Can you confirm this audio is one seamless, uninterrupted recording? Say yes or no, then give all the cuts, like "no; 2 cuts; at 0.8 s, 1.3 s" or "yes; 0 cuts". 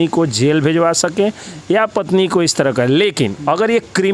yes; 0 cuts